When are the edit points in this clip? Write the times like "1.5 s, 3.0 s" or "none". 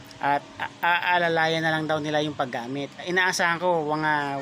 3.0 s